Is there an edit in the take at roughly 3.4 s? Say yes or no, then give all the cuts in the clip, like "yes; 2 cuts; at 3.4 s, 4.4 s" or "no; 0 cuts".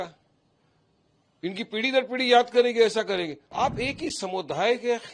yes; 1 cut; at 3.4 s